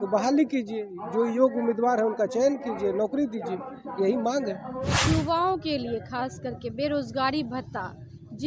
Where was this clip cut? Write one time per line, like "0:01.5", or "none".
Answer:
0:05.1